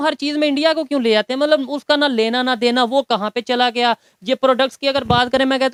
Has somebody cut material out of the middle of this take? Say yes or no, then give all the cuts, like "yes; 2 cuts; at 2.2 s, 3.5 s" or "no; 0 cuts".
no; 0 cuts